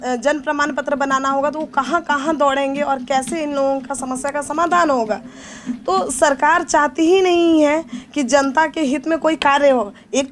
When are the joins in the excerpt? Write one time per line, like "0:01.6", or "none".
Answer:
none